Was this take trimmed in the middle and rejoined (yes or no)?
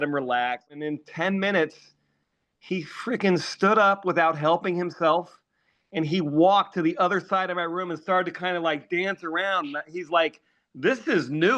yes